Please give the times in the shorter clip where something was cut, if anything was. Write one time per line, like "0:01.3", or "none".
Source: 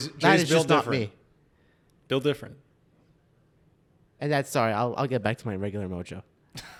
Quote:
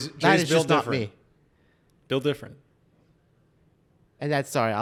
none